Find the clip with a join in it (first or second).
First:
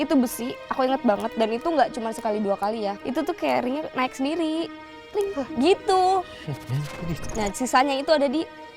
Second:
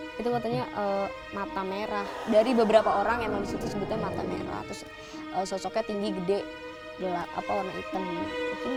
first